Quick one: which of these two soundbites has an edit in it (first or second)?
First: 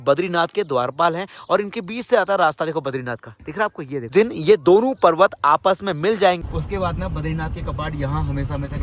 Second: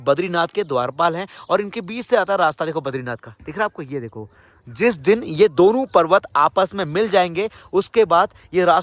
first